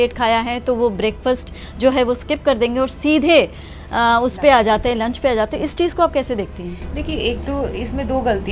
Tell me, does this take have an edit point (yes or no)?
no